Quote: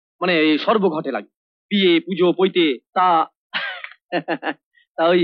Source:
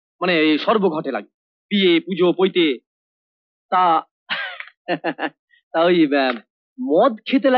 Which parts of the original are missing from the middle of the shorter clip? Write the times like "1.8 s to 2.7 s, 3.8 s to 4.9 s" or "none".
2.8 s to 3.6 s